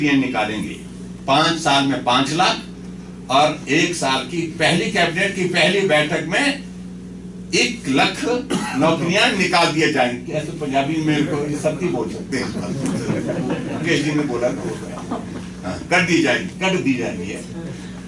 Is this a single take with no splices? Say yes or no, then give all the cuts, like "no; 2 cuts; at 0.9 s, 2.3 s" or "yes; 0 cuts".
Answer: yes; 0 cuts